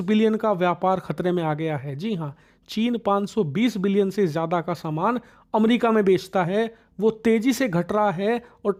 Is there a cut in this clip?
no; 0 cuts

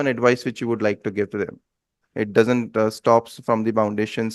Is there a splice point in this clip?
yes; 1 cut; at 2.0 s

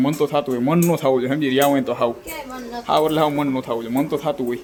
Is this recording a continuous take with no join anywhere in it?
yes; 0 cuts

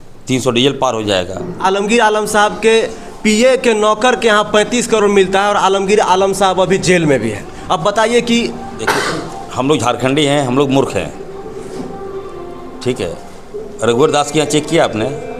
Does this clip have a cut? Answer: yes; 1 cut; at 1.6 s

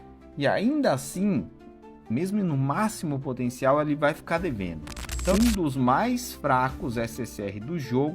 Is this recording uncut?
no; 1 cut; at 5.3 s

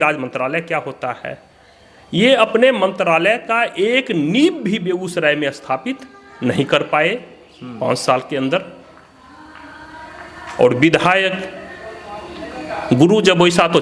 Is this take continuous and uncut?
yes; 0 cuts

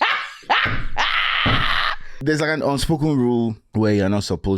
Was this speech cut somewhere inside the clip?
yes; 2 cuts; at 2.1 s, 3.6 s

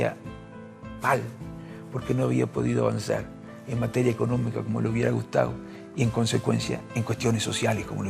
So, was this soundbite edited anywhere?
no; 0 cuts

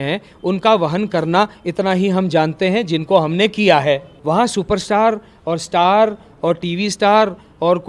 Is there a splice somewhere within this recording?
yes; 1 cut; at 4.1 s

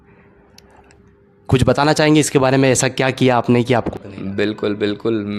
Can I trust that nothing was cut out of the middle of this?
no; 1 cut; at 3.9 s

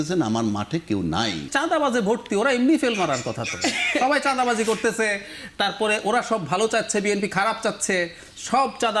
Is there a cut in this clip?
yes; 1 cut; at 1.5 s

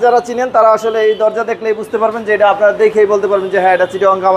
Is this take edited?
no; 0 cuts

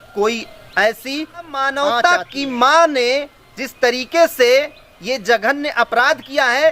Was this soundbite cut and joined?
yes; 1 cut; at 1.7 s

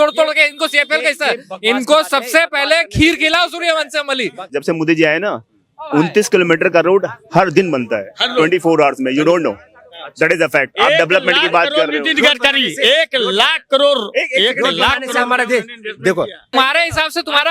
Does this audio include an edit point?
yes; 2 cuts; at 4.5 s, 16.5 s

